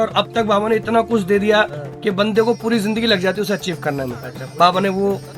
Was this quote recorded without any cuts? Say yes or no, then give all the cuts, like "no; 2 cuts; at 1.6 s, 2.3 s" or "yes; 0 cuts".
yes; 0 cuts